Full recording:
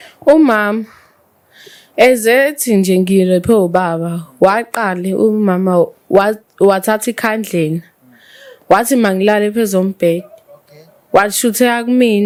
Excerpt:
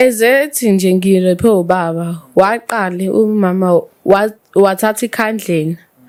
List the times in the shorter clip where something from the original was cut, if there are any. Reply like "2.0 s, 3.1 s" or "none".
none